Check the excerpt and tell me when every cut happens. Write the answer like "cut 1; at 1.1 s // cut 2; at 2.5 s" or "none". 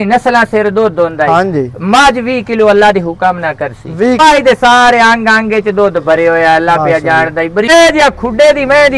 cut 1; at 4.2 s // cut 2; at 7.7 s